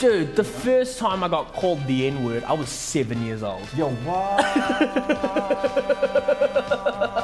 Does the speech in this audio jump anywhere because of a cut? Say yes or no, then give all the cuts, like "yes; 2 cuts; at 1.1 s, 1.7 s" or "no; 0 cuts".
no; 0 cuts